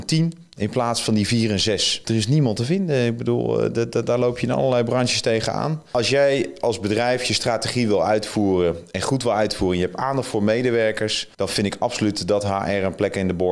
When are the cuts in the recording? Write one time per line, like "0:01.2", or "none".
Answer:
0:02.0
0:05.8
0:11.2